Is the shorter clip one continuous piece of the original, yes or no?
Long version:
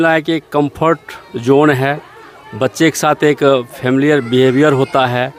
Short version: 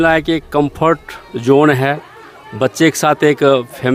yes